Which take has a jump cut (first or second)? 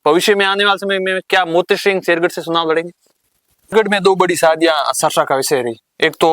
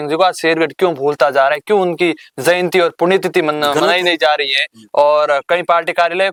first